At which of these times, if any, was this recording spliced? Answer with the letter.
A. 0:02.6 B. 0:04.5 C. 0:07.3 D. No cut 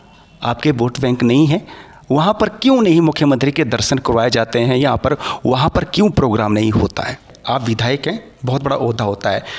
C